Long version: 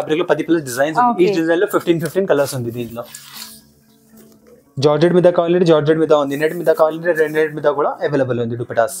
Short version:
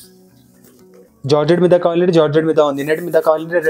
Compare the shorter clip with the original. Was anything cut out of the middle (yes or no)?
no